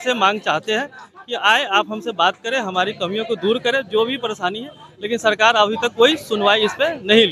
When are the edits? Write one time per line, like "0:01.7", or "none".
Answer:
none